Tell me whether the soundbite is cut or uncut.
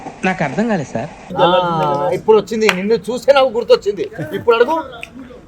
cut